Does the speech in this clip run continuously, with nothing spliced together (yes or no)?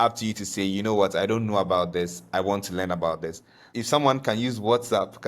no